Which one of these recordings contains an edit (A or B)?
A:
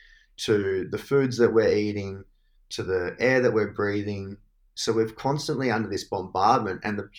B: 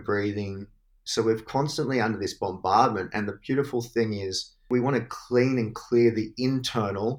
B